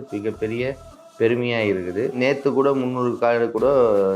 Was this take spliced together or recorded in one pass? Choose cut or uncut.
cut